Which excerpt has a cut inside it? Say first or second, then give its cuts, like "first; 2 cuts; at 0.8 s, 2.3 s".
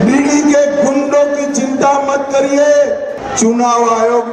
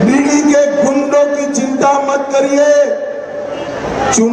first; 1 cut; at 3.2 s